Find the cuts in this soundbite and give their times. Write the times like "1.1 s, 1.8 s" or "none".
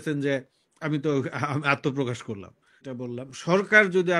2.8 s